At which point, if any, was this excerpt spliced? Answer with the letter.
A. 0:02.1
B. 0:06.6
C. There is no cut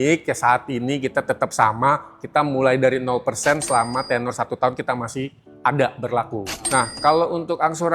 B